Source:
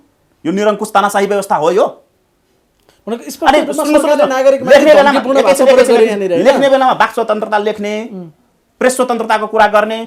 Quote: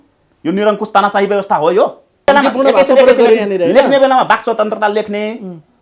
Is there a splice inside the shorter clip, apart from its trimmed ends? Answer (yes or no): yes